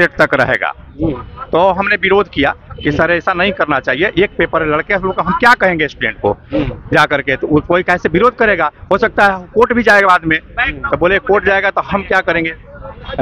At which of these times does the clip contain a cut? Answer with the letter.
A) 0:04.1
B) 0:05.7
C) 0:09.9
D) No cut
D